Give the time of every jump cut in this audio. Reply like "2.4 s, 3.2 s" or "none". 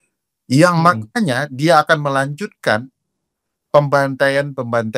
none